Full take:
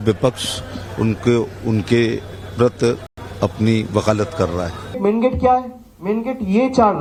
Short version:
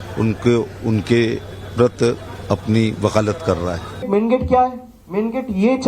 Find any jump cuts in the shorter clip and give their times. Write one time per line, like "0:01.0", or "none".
0:02.3